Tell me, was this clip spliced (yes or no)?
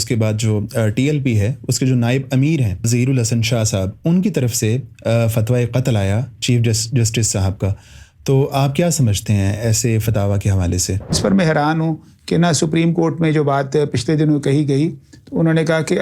yes